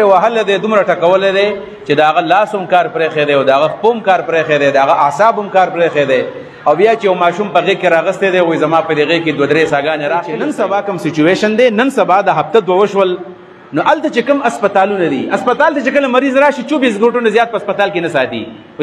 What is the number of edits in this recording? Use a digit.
1